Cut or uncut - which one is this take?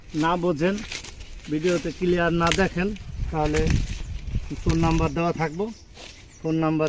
uncut